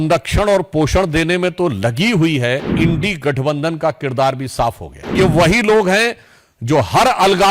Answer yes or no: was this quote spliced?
yes